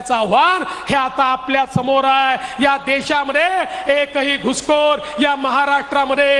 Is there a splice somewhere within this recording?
no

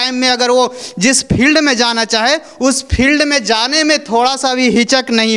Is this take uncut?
yes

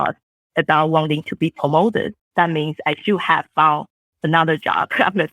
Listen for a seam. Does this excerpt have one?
no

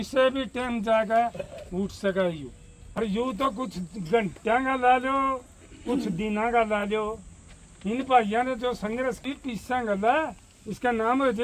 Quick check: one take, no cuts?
no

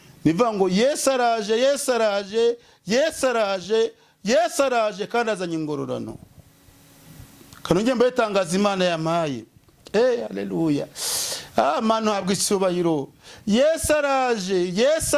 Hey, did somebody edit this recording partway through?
no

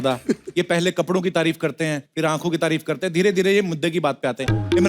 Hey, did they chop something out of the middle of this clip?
yes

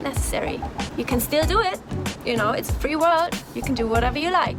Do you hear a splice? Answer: no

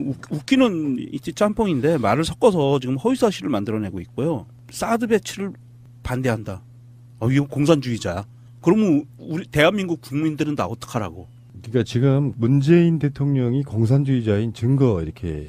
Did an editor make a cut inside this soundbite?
yes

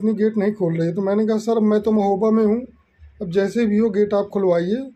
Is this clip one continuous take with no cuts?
yes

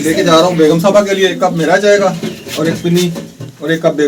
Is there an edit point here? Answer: no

